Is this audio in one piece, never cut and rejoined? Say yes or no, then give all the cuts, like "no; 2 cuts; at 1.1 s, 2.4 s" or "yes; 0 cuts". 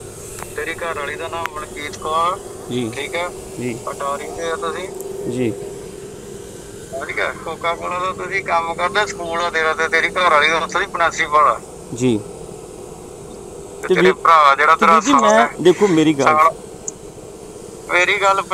yes; 0 cuts